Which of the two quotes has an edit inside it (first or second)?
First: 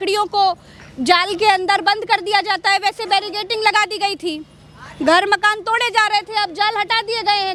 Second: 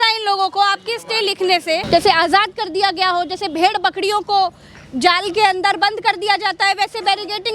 second